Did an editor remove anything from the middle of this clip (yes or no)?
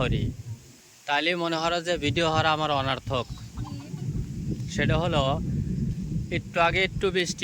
no